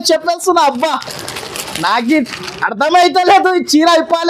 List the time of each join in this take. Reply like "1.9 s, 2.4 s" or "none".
none